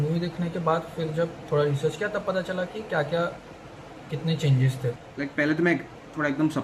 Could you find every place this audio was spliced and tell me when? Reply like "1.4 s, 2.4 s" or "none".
4.9 s